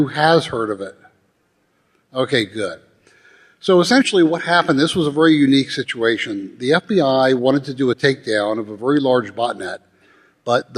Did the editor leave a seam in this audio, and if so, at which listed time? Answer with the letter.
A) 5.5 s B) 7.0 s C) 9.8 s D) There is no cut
A